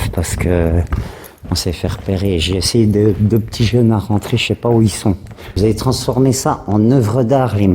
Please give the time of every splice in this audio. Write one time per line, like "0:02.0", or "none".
0:05.4